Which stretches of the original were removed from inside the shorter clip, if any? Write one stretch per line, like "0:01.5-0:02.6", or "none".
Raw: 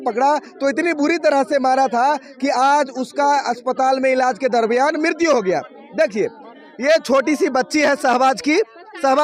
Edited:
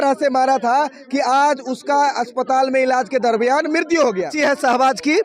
0:05.6-0:07.7